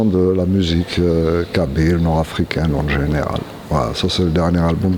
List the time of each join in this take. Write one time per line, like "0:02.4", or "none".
none